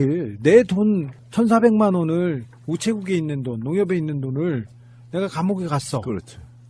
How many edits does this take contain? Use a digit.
1